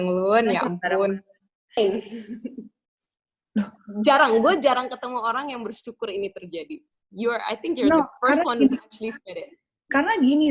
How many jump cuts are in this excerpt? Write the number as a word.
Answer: one